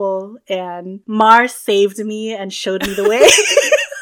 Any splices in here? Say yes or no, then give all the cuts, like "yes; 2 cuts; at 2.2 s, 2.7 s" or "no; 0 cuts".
yes; 1 cut; at 0.9 s